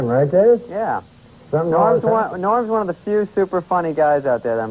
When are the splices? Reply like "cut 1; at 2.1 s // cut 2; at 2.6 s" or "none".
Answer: cut 1; at 1.5 s